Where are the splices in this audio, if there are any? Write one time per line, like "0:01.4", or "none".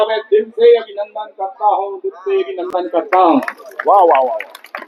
none